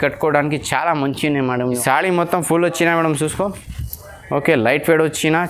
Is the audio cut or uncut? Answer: cut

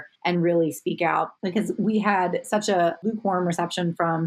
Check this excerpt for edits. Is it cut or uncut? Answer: uncut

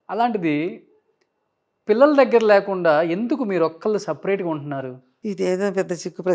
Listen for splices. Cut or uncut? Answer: uncut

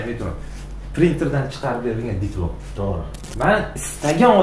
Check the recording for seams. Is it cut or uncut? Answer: cut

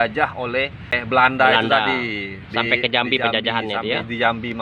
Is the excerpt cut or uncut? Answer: cut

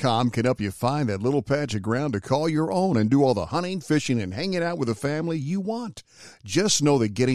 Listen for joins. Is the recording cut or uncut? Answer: uncut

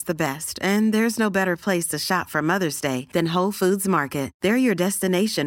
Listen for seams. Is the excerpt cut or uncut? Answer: uncut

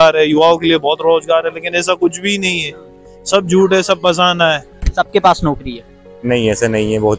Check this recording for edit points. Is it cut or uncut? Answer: cut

